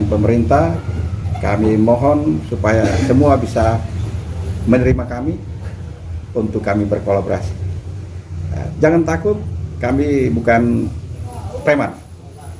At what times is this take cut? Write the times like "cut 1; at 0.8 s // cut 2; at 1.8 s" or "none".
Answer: none